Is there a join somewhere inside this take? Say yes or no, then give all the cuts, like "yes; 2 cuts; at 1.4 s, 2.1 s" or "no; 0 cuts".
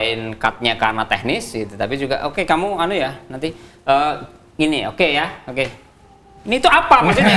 no; 0 cuts